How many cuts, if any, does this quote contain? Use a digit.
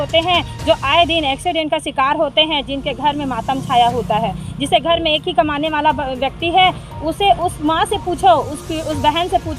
0